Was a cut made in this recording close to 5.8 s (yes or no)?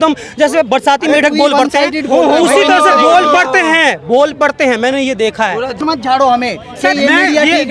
yes